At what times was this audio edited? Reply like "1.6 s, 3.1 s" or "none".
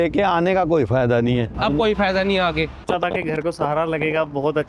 1.5 s, 2.8 s